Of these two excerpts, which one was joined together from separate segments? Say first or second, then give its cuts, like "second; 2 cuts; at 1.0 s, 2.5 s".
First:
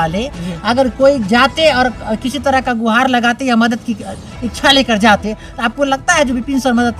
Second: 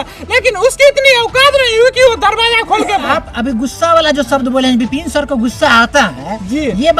second; 1 cut; at 3.0 s